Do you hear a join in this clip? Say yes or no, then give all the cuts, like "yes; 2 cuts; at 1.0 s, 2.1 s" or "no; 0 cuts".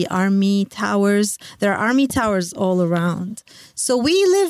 no; 0 cuts